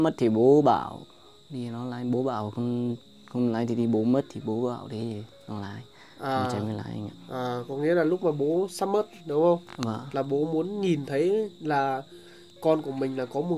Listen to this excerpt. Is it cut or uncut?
uncut